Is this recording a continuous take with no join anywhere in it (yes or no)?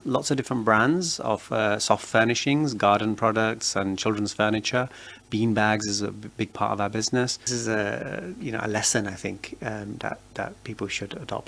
no